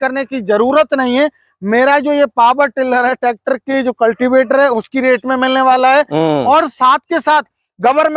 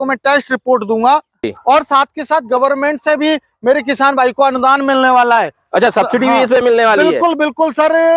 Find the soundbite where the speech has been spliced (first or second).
second